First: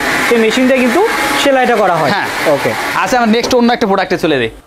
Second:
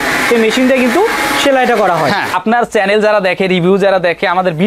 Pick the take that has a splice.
second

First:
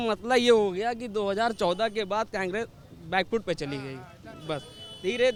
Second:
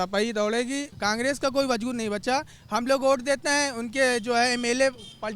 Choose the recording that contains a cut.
second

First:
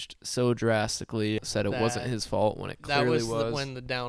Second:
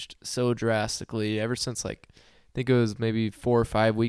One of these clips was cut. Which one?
first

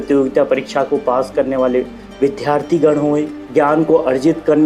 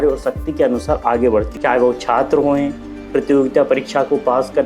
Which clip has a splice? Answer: second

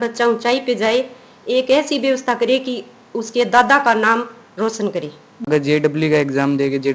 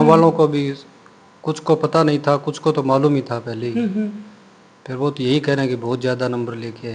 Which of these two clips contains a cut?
first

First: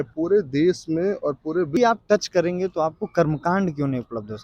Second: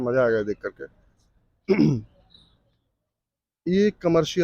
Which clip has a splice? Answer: first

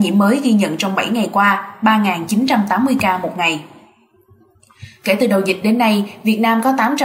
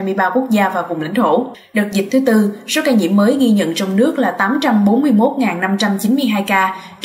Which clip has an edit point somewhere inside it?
second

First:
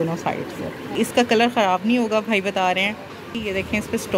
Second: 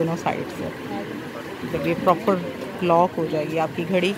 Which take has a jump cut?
first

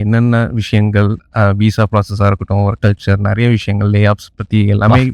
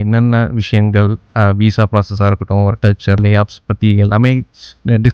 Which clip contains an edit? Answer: second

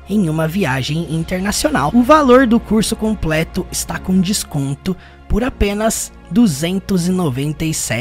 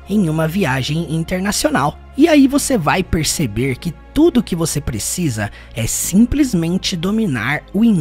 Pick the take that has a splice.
first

